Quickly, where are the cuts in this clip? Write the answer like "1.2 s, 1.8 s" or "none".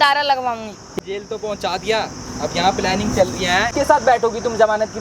1.0 s, 3.7 s